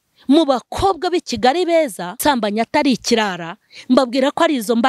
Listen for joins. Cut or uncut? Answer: cut